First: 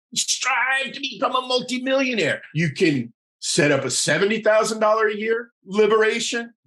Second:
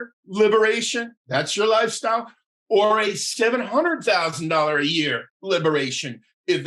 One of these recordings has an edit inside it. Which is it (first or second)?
first